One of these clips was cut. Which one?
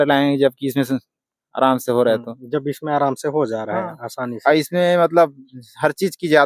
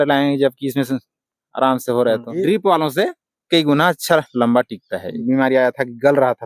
second; 2 cuts; at 2.3 s, 5.2 s

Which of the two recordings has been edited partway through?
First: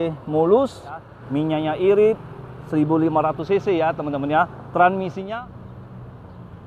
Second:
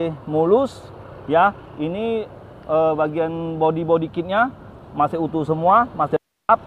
first; 2 cuts; at 1.2 s, 5.2 s

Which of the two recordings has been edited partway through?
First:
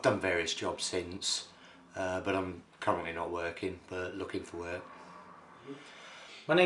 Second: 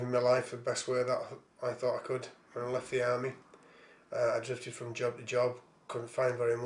first; 1 cut; at 5.3 s

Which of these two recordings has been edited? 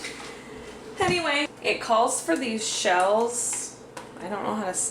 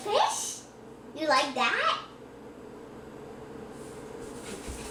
first; 1 cut; at 1.5 s

